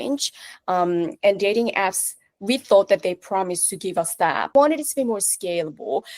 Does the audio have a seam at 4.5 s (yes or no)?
yes